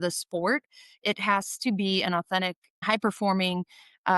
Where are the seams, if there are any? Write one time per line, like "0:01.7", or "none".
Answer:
0:02.8